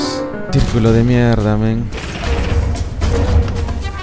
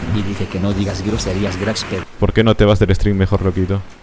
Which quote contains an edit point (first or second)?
second